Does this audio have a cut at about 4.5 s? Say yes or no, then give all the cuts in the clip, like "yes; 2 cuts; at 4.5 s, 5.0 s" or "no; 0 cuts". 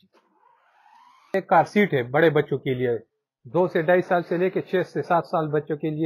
no; 1 cut; at 1.3 s